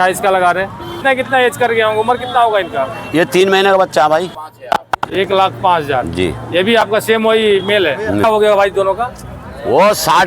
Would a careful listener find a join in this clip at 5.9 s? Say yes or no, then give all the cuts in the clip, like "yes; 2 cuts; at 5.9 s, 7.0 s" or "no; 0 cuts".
no; 3 cuts; at 0.9 s, 4.3 s, 8.2 s